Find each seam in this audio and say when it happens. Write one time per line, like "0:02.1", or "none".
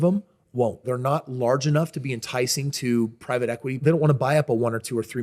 0:00.9
0:03.8